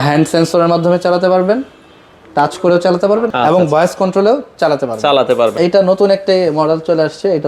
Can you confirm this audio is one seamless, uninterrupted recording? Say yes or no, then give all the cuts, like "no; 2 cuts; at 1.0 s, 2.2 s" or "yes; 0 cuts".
no; 1 cut; at 5.5 s